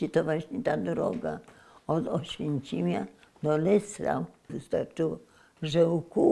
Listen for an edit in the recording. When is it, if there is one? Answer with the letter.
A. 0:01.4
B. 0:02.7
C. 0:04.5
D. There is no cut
C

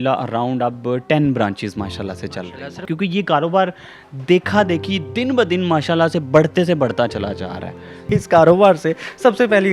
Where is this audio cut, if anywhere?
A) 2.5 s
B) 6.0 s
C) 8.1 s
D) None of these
C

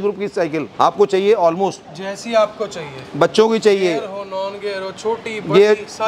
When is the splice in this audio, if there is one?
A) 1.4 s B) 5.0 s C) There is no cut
C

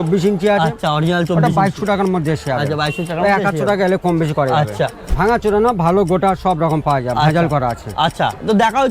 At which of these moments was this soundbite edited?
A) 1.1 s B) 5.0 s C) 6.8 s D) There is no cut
B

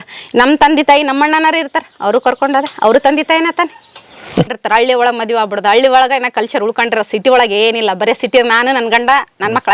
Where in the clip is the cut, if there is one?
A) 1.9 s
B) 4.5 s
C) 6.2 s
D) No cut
B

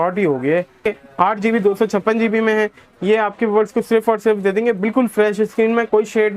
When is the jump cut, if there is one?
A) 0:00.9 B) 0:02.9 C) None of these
A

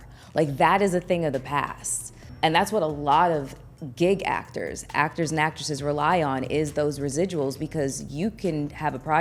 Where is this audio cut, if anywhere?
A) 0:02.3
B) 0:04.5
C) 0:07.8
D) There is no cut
A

